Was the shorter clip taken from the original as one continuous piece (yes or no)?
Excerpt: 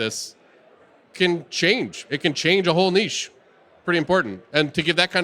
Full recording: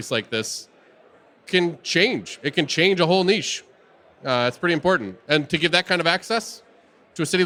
no